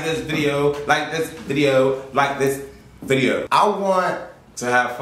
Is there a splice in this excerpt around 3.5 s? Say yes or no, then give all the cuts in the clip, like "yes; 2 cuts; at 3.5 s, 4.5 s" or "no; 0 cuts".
yes; 1 cut; at 3.5 s